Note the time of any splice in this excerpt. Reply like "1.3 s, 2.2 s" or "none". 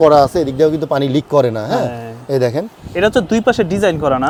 none